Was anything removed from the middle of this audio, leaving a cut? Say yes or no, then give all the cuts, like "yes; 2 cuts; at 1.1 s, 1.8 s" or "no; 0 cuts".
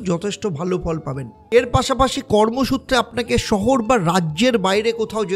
yes; 1 cut; at 1.4 s